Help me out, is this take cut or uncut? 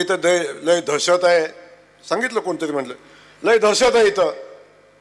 uncut